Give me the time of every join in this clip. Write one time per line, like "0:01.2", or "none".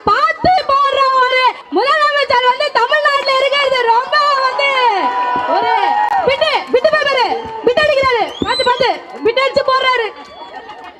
0:01.6